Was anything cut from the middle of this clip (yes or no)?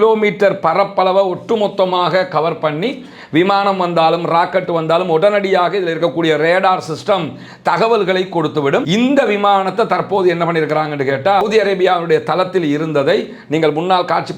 yes